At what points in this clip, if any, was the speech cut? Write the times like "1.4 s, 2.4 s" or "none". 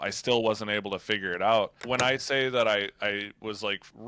1.8 s